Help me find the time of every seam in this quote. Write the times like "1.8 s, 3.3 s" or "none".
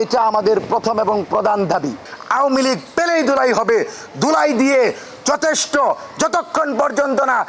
2.1 s